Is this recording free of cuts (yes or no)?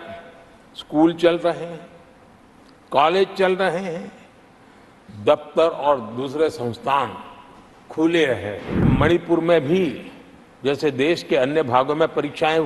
no